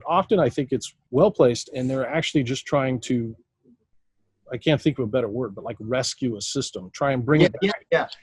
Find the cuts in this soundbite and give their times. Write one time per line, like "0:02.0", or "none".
0:01.0